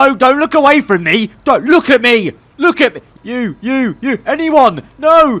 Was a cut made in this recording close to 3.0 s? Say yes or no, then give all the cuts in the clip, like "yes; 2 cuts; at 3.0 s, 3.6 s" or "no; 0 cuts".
yes; 1 cut; at 3.0 s